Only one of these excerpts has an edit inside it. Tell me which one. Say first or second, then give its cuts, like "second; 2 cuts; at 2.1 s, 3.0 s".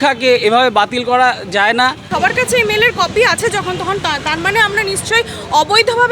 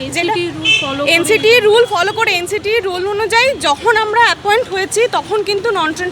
first; 1 cut; at 2.0 s